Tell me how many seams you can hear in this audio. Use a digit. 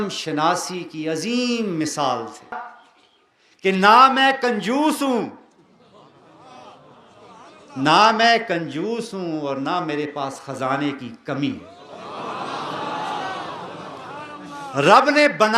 1